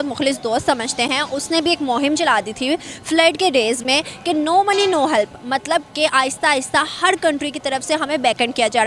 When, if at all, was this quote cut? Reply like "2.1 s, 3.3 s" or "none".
none